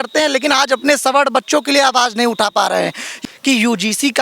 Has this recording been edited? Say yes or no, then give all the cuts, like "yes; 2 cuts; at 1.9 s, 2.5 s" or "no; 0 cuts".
yes; 1 cut; at 3.1 s